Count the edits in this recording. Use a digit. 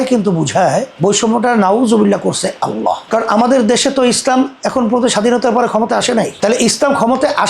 0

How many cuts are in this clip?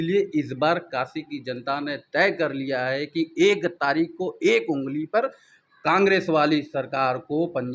0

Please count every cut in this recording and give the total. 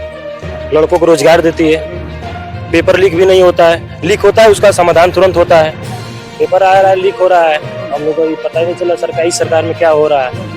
1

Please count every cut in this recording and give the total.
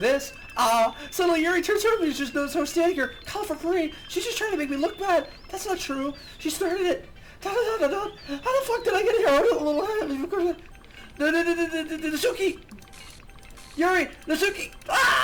0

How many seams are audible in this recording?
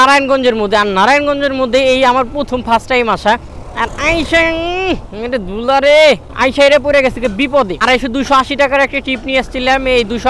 1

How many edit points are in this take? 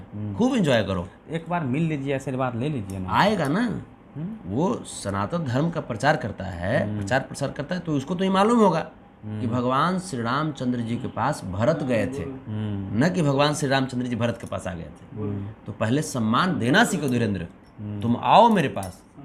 0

